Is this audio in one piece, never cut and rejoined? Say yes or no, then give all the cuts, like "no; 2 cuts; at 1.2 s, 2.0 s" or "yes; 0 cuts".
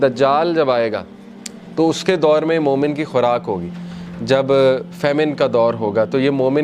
yes; 0 cuts